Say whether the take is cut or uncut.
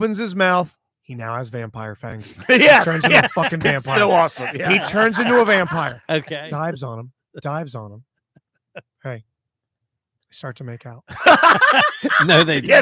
cut